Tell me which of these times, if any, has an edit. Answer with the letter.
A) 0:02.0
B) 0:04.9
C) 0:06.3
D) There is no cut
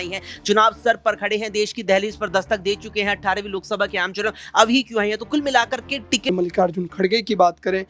C